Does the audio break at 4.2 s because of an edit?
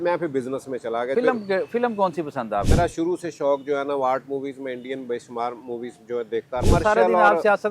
no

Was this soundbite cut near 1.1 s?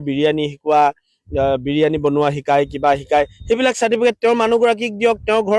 no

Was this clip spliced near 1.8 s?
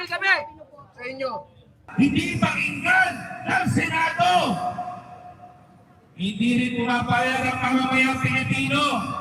yes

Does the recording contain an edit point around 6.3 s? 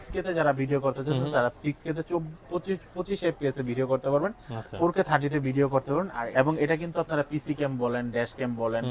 yes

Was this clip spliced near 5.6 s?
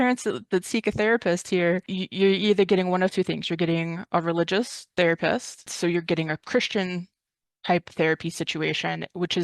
yes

